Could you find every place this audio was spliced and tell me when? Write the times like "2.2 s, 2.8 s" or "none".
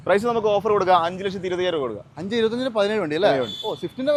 none